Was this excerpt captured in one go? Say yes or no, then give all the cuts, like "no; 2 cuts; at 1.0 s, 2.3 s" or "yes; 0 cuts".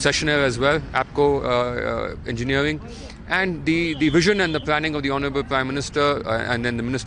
yes; 0 cuts